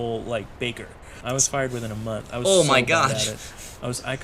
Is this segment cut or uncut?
cut